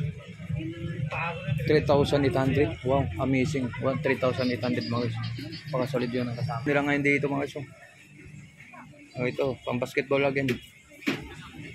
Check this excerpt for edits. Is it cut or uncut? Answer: cut